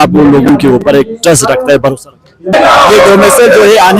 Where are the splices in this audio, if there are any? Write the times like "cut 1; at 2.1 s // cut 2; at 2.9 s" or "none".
cut 1; at 2.5 s